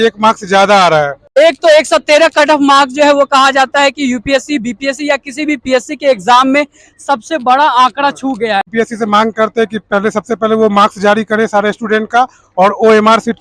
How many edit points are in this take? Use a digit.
2